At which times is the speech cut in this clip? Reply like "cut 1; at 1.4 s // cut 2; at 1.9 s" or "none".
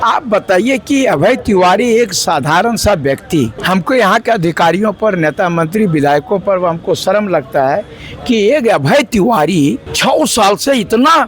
cut 1; at 3.6 s // cut 2; at 9.9 s